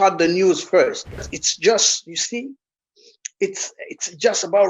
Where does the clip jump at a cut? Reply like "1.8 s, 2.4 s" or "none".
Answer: 1.4 s